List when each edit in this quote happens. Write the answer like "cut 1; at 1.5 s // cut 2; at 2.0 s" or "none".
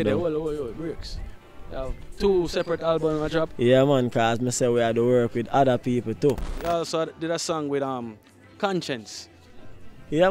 cut 1; at 6.5 s